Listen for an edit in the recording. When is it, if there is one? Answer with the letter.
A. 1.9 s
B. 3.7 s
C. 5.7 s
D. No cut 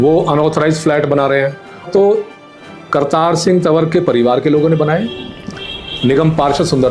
A